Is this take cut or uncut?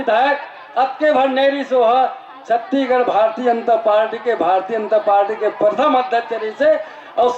uncut